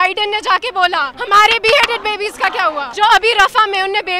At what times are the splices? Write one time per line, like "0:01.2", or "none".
0:01.1
0:02.9